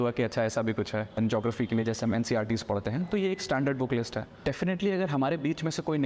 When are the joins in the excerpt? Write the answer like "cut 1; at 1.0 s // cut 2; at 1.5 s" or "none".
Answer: cut 1; at 1.1 s // cut 2; at 4.3 s